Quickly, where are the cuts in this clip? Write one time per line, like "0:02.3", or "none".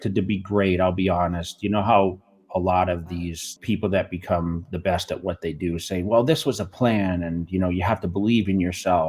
0:03.5

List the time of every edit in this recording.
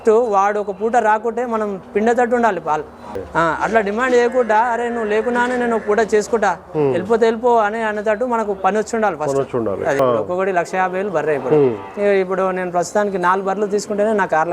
0:03.2
0:10.0

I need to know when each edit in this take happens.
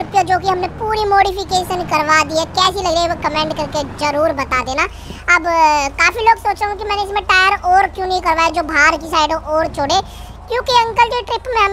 none

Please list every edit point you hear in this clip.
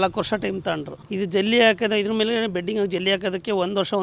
0:01.0

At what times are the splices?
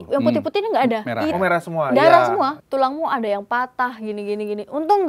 0:02.6

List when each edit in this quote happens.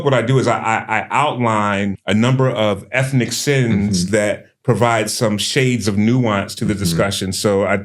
0:02.0

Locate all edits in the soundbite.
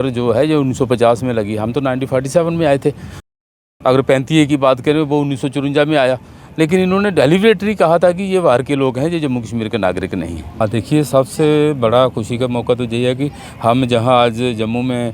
0:10.5

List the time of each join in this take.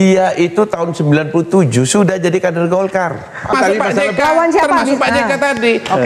0:03.5

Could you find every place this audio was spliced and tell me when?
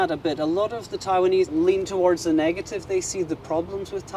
0:01.5

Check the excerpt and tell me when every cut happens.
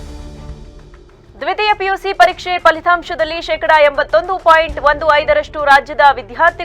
0:01.0

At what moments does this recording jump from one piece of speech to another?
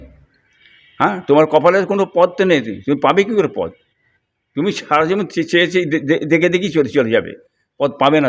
none

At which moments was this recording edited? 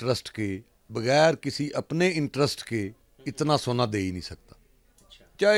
none

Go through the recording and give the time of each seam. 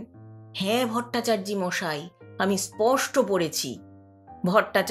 0:04.0

